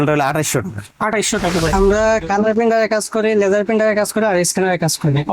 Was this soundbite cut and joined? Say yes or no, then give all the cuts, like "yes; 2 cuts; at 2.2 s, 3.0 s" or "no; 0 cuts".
yes; 1 cut; at 1.7 s